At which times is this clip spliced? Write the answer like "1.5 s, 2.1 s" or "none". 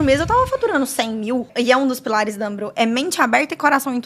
1.5 s